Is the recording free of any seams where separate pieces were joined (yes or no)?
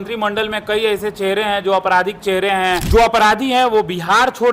no